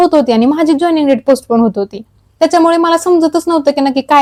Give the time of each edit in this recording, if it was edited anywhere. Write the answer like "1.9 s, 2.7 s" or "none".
none

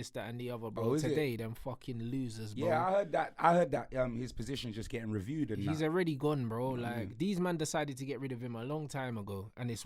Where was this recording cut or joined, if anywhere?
none

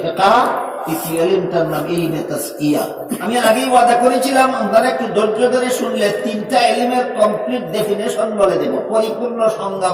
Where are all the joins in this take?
3.2 s

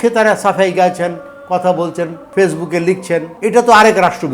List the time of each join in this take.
2.2 s, 3.3 s

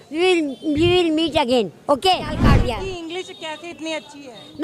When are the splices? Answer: 2.5 s

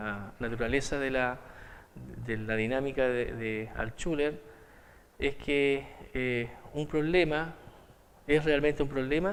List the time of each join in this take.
none

